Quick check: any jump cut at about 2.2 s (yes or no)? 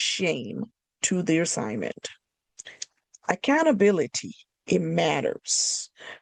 no